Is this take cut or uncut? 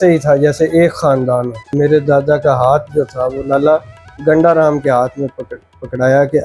uncut